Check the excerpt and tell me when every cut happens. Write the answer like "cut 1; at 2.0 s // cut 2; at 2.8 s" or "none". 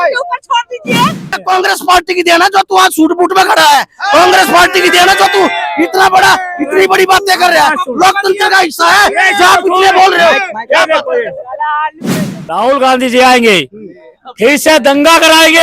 cut 1; at 1.4 s // cut 2; at 12.4 s